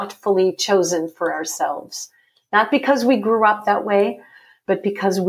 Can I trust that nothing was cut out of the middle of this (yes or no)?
yes